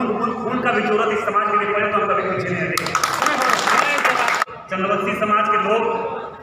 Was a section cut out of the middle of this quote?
yes; 1 cut; at 4.4 s

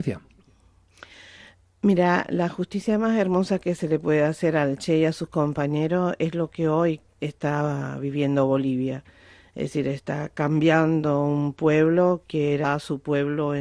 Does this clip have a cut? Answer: no; 0 cuts

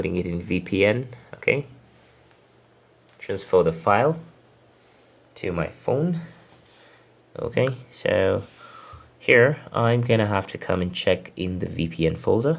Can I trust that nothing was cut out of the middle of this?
yes; 0 cuts

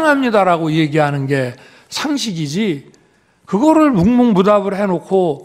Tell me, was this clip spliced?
no; 0 cuts

